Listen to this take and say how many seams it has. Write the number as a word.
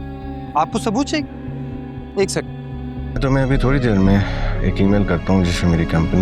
one